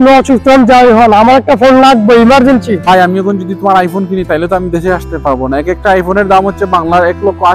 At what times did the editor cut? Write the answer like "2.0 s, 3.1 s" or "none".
2.9 s